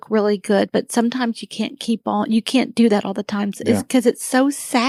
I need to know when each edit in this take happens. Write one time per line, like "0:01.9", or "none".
none